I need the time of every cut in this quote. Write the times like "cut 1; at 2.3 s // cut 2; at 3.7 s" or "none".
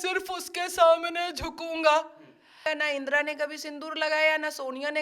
cut 1; at 2.6 s

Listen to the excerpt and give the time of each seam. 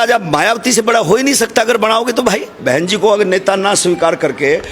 cut 1; at 2.6 s

